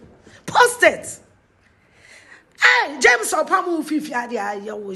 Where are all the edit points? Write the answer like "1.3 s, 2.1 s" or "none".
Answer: none